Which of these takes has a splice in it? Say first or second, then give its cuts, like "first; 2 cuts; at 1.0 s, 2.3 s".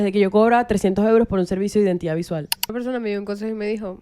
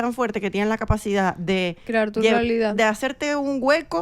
first; 1 cut; at 2.7 s